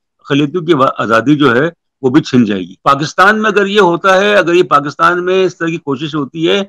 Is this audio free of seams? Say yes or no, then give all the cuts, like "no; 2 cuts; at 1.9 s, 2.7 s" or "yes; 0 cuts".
no; 1 cut; at 2.7 s